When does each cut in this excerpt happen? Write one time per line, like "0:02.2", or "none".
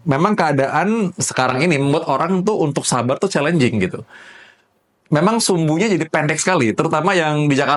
none